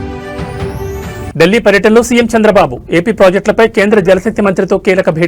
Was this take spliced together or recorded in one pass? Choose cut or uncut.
cut